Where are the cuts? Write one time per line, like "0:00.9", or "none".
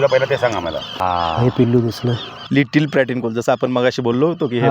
0:00.9
0:02.3